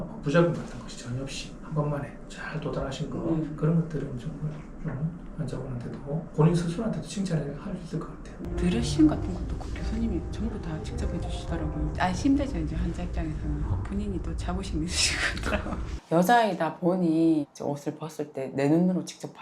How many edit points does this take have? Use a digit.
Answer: 2